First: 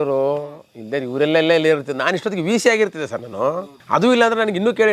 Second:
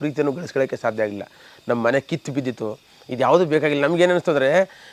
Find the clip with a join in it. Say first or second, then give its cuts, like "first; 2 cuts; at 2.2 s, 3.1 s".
first; 1 cut; at 3.7 s